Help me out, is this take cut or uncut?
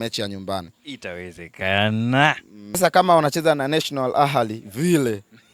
cut